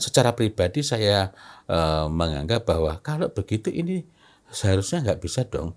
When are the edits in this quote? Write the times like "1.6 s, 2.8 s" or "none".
none